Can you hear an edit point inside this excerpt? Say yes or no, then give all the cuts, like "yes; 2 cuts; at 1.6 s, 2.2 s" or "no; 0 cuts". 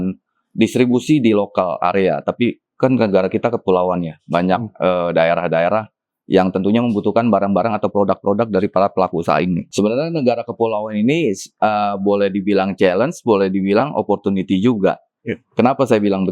yes; 1 cut; at 9.6 s